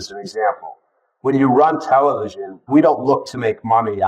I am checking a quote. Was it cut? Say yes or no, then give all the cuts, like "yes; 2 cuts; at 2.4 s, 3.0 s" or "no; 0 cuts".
yes; 1 cut; at 2.6 s